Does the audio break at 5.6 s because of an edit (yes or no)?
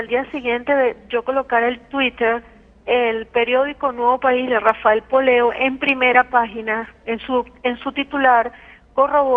yes